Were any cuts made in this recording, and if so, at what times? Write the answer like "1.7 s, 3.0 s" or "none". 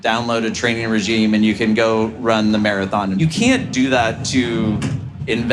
3.2 s